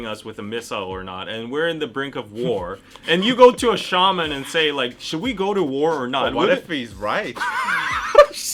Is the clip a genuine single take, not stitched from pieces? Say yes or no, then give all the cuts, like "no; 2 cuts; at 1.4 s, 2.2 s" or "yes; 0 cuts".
yes; 0 cuts